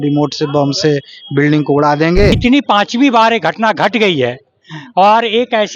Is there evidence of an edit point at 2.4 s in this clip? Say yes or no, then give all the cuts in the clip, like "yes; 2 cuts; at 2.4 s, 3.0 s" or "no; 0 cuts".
yes; 1 cut; at 2.4 s